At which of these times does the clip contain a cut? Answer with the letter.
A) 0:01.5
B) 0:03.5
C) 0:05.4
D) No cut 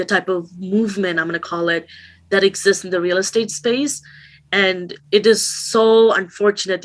D